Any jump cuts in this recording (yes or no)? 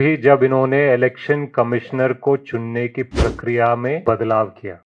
yes